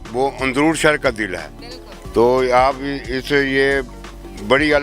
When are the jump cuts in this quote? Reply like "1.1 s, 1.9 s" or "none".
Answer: none